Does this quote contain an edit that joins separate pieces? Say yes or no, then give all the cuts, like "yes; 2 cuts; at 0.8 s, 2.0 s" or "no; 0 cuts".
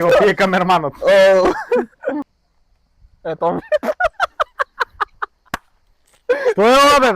yes; 1 cut; at 2.2 s